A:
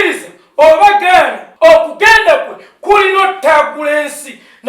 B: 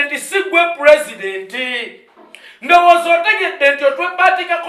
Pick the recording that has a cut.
A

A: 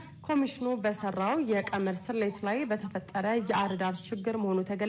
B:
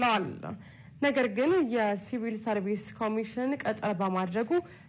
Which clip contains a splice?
A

